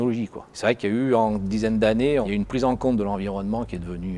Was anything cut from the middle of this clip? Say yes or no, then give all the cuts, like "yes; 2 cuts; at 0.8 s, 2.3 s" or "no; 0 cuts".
no; 0 cuts